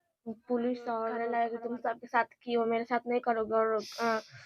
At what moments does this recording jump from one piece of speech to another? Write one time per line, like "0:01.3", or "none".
0:01.2